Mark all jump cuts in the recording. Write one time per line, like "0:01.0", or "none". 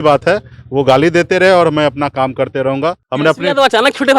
0:03.0